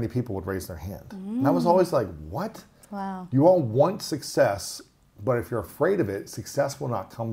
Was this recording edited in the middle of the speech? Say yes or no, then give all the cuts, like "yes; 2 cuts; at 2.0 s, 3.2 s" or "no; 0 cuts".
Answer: no; 0 cuts